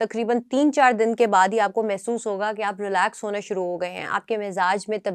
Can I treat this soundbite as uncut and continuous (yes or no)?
yes